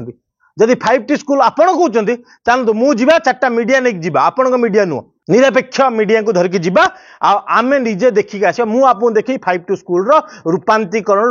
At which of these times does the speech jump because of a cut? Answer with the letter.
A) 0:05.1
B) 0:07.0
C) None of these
A